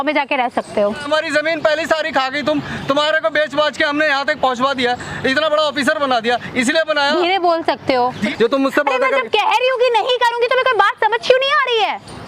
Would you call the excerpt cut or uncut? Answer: cut